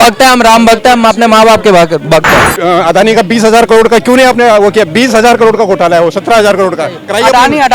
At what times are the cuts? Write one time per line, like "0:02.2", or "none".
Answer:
0:02.5